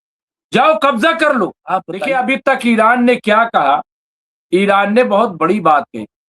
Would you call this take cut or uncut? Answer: cut